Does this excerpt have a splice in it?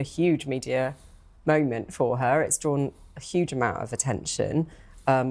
no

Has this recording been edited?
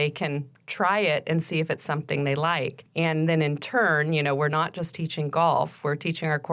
yes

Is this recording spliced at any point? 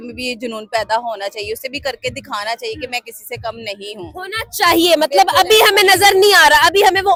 no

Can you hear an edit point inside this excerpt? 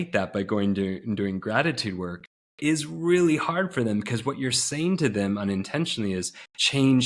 no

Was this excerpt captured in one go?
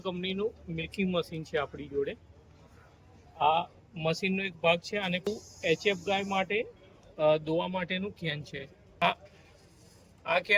no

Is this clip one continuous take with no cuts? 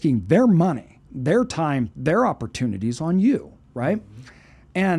yes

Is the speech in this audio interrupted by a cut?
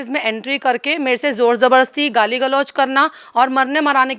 no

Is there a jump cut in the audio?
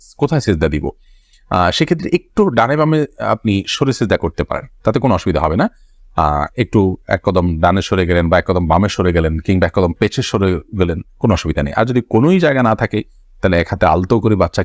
no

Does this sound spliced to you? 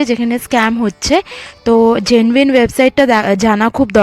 no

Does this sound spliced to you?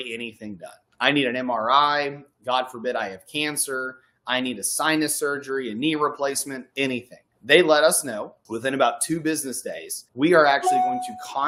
no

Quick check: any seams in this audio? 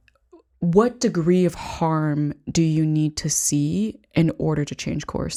no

